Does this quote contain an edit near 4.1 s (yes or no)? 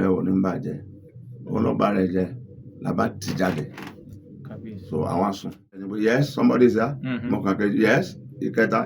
no